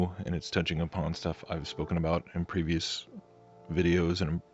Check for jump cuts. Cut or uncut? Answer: cut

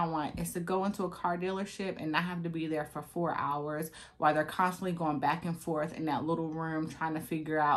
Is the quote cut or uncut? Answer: uncut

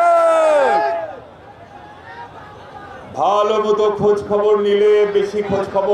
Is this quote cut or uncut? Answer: uncut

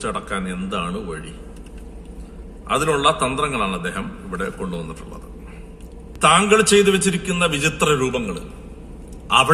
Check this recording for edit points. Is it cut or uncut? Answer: cut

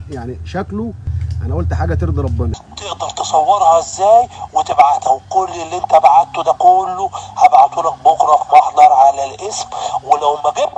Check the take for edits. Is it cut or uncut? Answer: cut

